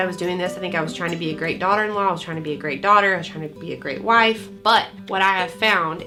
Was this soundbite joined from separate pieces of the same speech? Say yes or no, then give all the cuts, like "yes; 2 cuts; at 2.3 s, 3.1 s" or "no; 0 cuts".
no; 0 cuts